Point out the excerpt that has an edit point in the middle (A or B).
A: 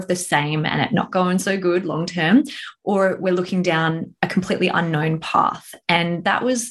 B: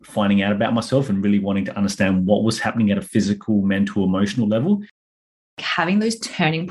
B